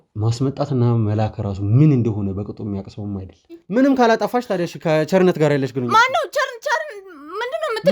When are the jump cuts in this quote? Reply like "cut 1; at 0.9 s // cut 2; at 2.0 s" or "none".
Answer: cut 1; at 3.6 s